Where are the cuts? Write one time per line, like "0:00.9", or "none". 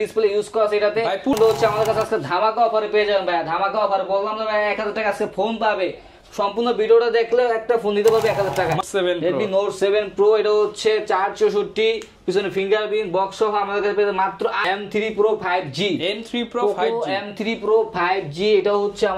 0:01.3
0:08.8
0:14.6